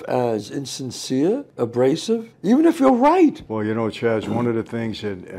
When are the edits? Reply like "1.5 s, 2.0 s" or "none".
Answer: 3.4 s